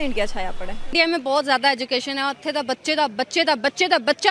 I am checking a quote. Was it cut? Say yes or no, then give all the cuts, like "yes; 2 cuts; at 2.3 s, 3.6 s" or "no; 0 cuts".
yes; 1 cut; at 0.9 s